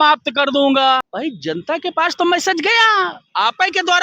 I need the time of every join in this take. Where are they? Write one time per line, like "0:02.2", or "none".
0:01.0